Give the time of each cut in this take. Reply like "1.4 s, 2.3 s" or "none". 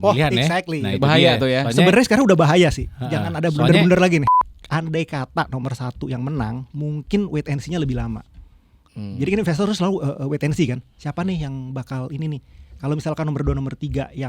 4.3 s